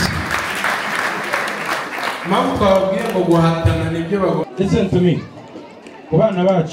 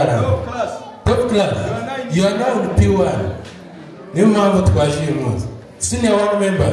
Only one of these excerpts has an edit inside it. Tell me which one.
first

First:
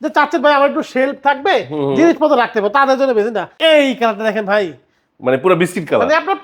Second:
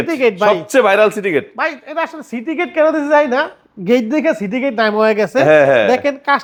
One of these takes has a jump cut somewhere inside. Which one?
first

